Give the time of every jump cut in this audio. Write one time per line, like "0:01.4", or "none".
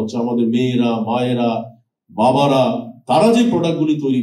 none